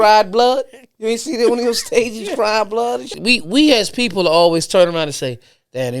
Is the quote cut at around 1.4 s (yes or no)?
no